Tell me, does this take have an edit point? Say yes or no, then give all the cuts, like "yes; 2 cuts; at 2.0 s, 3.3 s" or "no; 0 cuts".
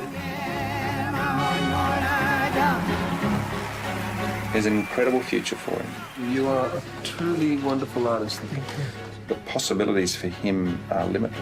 no; 0 cuts